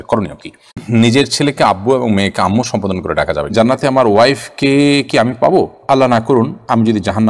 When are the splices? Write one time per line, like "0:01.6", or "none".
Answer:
0:00.8
0:03.5